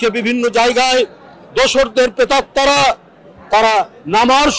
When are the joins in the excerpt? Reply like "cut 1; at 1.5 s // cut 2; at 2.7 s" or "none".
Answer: none